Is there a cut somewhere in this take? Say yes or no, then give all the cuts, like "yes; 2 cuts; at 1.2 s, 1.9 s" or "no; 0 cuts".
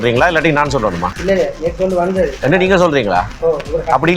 yes; 2 cuts; at 1.1 s, 2.4 s